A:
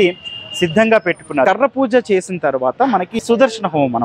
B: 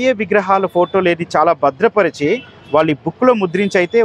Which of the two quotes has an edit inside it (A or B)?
A